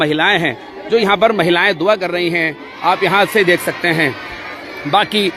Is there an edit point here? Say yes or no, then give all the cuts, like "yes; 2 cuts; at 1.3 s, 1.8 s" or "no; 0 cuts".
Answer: no; 0 cuts